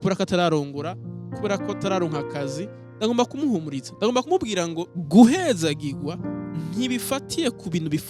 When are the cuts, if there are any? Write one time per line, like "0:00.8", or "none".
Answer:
0:04.9